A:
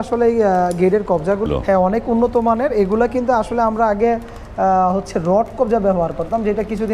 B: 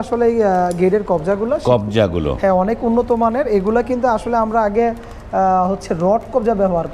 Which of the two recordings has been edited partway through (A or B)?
A